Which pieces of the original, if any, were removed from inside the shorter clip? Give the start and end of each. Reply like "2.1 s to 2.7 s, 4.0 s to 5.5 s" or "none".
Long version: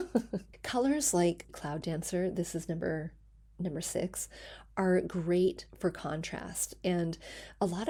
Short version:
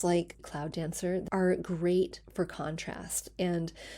2.3 s to 4.7 s